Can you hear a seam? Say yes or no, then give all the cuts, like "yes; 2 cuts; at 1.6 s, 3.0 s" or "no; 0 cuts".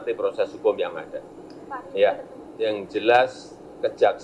yes; 1 cut; at 2.4 s